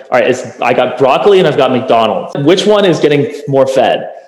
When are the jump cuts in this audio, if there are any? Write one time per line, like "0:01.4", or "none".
0:02.4